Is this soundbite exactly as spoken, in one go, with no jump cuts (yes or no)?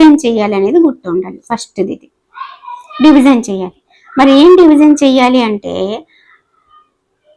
yes